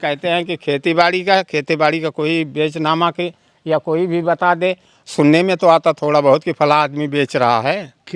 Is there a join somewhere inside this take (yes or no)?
no